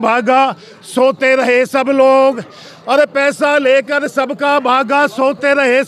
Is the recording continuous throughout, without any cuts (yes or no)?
yes